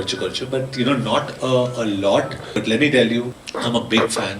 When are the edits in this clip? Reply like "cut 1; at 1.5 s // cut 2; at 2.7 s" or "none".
cut 1; at 2.5 s // cut 2; at 3.4 s